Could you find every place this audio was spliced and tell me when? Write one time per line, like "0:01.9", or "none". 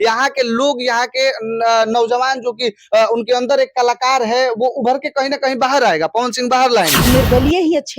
0:07.0